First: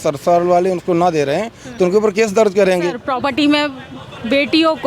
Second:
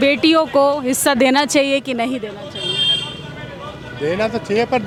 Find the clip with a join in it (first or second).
first